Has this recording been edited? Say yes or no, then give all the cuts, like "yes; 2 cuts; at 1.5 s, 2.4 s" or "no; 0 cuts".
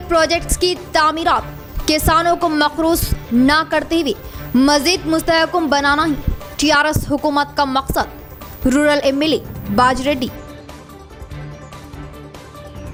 no; 0 cuts